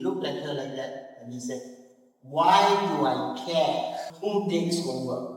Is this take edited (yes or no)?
yes